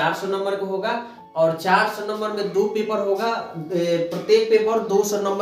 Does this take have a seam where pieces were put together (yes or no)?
no